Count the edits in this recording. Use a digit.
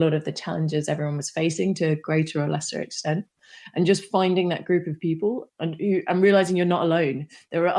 1